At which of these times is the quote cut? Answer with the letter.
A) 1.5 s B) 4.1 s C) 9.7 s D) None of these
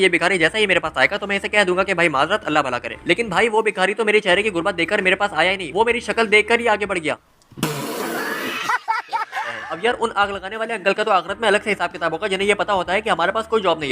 C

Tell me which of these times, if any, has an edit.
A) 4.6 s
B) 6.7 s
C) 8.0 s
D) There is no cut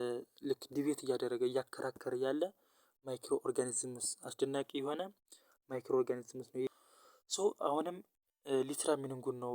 B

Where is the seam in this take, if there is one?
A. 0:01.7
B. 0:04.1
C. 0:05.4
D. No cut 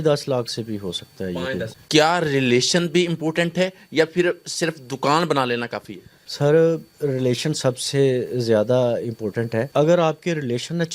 A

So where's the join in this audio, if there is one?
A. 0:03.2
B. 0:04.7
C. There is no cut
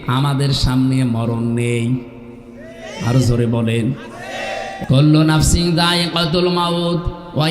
B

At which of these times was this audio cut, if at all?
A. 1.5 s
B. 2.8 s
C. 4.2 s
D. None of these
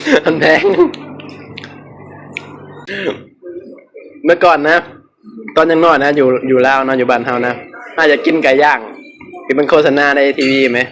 B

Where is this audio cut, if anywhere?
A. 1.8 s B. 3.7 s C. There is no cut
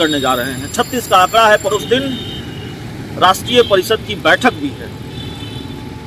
A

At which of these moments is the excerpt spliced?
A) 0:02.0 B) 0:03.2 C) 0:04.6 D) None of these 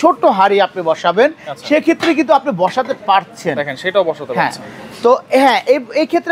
D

